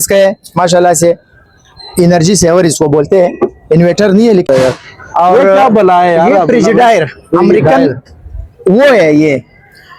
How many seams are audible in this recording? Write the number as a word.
one